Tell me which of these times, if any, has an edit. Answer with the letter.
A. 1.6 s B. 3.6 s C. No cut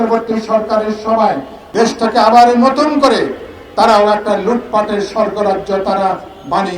A